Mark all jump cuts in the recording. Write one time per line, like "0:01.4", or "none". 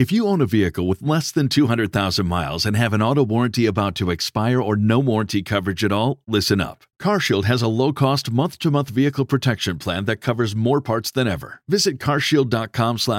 none